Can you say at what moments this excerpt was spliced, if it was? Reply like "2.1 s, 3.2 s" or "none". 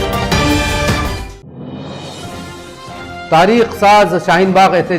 1.0 s